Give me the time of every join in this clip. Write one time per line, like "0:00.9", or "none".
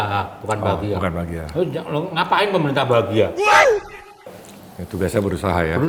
none